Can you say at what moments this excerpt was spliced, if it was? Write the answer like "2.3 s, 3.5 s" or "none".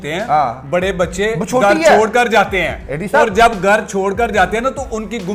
none